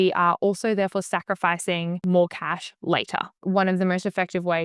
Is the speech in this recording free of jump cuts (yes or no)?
no